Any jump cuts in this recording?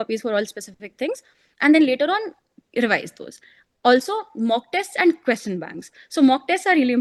no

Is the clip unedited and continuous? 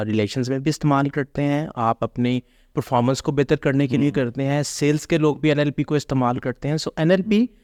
yes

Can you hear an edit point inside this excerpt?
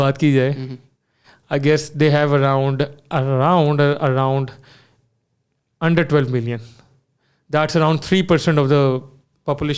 no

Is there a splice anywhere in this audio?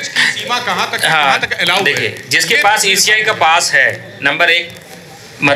no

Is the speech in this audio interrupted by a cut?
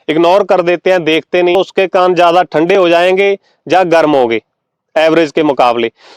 yes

